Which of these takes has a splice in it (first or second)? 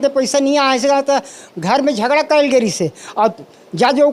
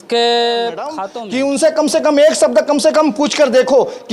second